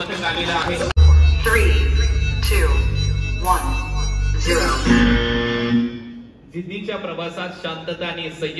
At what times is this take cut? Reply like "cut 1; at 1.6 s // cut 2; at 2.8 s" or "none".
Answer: cut 1; at 1.0 s